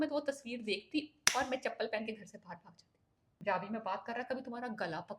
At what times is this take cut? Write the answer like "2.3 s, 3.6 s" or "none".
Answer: 3.4 s

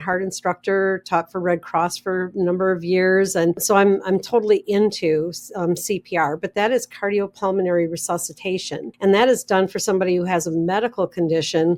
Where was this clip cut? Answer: 3.6 s, 8.8 s

